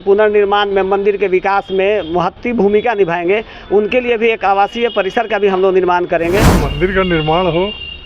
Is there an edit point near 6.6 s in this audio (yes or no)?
yes